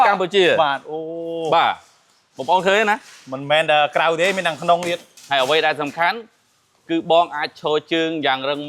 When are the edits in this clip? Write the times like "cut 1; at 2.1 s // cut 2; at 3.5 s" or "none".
cut 1; at 5.1 s